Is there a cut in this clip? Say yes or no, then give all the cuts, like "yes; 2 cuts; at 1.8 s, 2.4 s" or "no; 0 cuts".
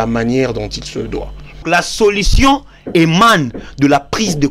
yes; 1 cut; at 1.6 s